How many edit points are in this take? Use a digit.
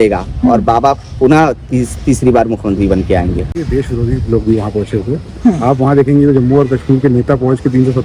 1